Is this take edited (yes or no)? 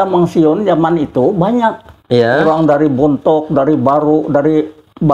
no